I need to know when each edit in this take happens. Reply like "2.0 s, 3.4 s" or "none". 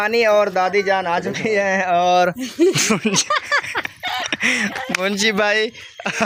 none